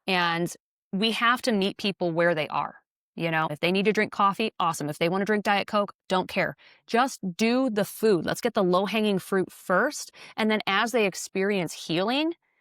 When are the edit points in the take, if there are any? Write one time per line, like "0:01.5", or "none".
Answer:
0:03.5

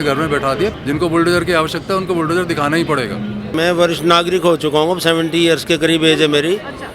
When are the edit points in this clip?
0:00.7
0:03.5

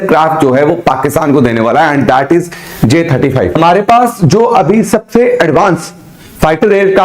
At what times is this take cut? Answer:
0:03.6

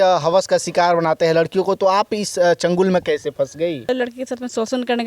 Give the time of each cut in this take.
0:03.9

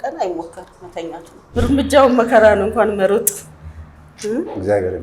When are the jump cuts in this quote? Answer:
0:01.3

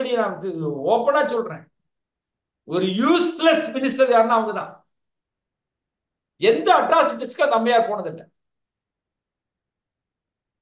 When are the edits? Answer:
none

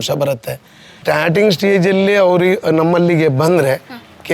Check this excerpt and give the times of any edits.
0:01.0

